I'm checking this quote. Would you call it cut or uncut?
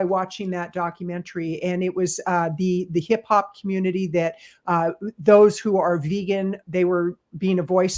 uncut